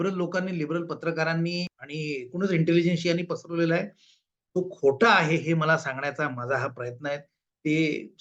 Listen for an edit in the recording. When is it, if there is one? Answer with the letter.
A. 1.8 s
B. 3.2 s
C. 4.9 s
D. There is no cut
A